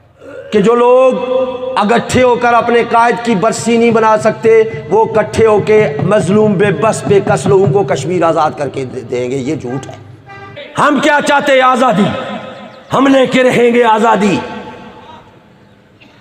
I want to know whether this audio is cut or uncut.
cut